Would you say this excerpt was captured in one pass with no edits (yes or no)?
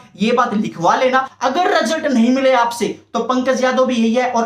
no